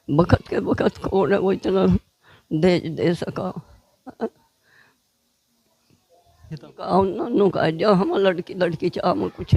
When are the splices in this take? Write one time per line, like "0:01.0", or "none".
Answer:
0:06.7